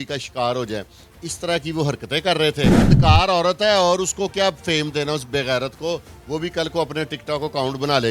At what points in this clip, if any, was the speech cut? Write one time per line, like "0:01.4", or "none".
0:02.9